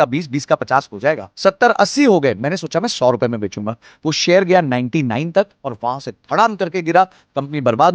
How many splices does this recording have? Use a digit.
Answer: 1